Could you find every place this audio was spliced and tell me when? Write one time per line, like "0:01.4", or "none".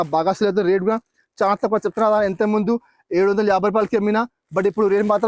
none